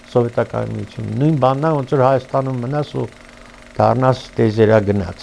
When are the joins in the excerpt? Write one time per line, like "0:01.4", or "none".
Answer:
none